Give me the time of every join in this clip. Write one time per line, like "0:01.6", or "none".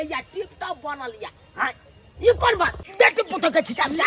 0:02.8